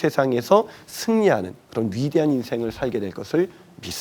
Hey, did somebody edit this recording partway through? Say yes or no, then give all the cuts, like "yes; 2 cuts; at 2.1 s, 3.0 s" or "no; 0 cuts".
no; 0 cuts